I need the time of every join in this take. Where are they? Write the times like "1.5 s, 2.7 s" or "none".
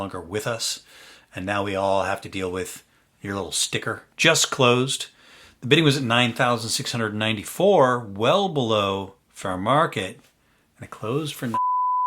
4.1 s